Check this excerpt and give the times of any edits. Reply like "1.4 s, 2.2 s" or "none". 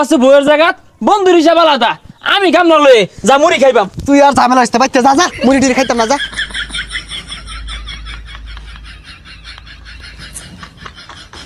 none